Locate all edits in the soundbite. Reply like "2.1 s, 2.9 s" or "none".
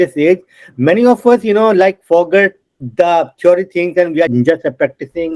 4.3 s